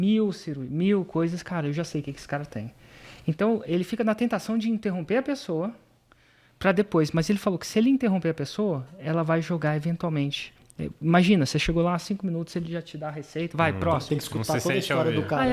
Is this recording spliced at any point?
no; 0 cuts

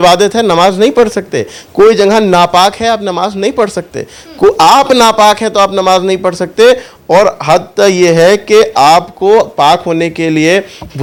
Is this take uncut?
yes; 0 cuts

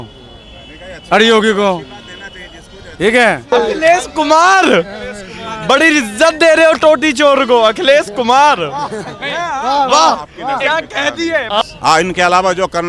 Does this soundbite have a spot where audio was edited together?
yes; 2 cuts; at 3.5 s, 11.6 s

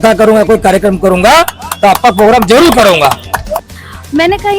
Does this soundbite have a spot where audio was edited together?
yes; 1 cut; at 3.6 s

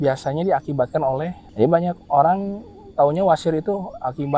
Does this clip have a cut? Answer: yes; 1 cut; at 1.4 s

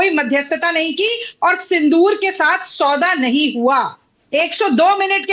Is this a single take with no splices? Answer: no; 1 cut; at 4.1 s

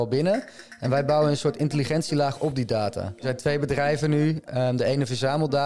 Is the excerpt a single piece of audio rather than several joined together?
no; 1 cut; at 3.1 s

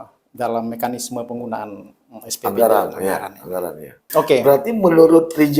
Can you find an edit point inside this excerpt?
yes; 1 cut; at 4.0 s

